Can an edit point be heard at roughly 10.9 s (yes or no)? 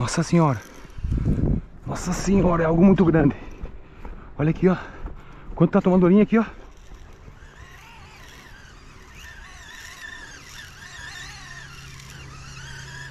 no